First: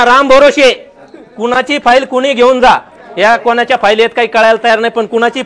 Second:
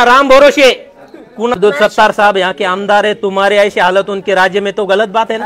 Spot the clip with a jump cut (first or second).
second